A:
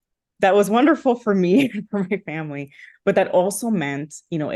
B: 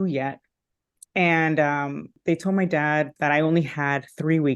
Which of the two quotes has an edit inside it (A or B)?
B